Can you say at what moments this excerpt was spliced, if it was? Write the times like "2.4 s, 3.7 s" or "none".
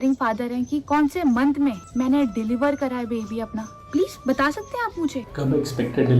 0.8 s, 1.8 s